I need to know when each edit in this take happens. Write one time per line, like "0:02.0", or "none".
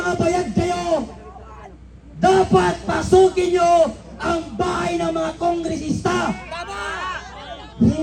none